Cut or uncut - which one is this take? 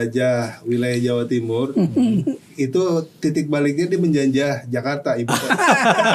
uncut